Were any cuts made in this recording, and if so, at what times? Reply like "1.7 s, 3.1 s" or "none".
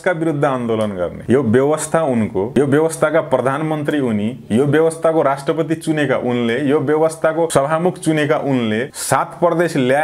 1.2 s, 2.5 s, 7.5 s, 8.9 s

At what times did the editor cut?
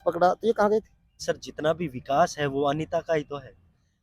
1.2 s

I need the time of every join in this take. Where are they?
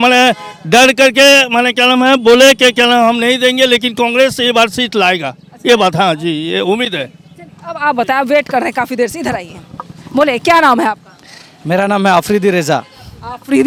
none

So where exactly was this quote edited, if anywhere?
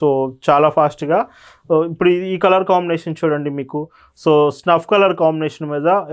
none

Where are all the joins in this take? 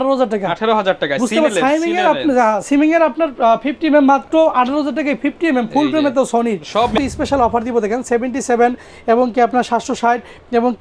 6.9 s

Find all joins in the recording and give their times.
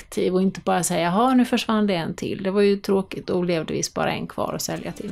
none

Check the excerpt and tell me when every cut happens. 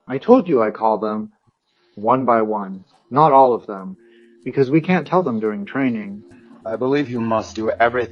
6.3 s

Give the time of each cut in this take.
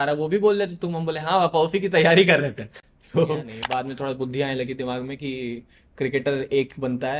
3.6 s

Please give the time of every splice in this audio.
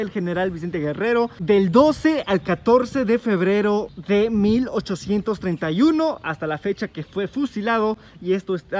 1.4 s, 3.9 s

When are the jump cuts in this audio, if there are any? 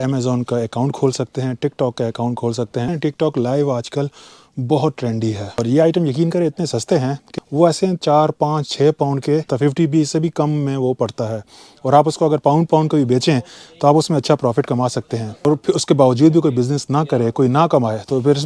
2.9 s, 5.6 s, 7.2 s, 9.5 s, 15.4 s

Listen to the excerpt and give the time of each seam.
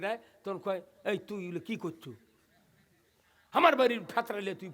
none

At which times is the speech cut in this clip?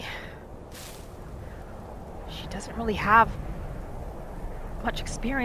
none

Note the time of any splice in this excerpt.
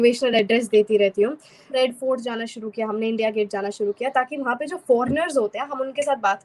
1.7 s

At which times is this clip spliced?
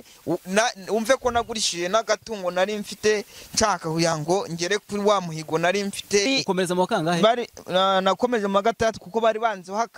6.3 s

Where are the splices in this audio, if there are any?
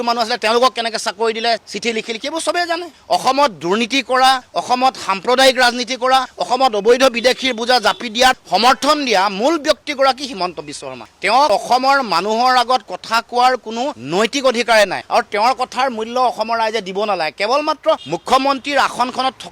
none

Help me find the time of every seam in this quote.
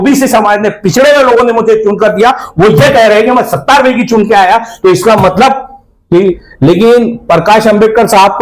6.5 s

